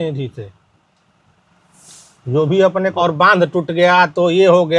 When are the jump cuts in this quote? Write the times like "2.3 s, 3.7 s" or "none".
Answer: 2.9 s